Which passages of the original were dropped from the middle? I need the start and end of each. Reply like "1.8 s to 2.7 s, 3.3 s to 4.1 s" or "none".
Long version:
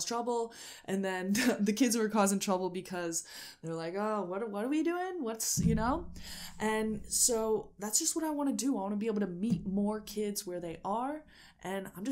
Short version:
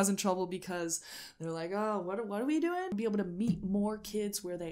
5.1 s to 8.9 s